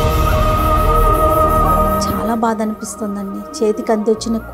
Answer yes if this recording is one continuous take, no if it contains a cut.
no